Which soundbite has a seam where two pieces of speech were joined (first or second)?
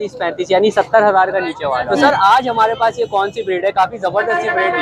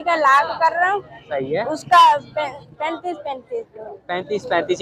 first